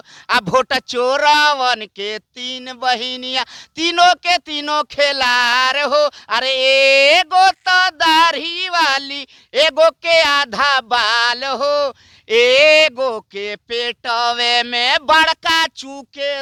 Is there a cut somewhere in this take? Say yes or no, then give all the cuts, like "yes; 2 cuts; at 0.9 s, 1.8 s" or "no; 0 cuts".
no; 0 cuts